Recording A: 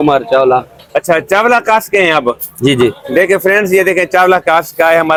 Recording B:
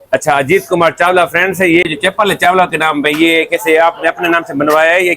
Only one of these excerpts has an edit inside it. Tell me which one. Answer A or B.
B